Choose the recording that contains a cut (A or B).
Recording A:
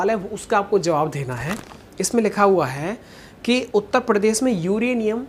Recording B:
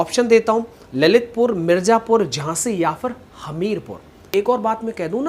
B